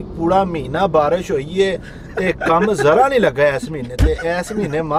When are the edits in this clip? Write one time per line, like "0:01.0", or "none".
none

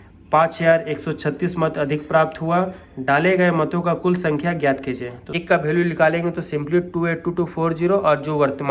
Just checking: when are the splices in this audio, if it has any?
0:05.3

